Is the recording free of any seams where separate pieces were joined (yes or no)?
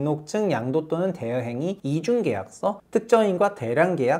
no